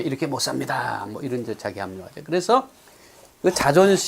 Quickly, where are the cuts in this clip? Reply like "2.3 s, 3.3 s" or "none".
2.0 s